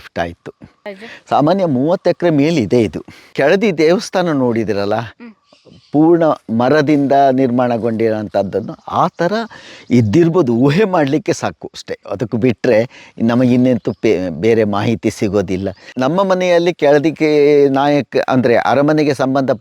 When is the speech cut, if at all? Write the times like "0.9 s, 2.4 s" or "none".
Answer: 1.0 s, 3.3 s, 15.9 s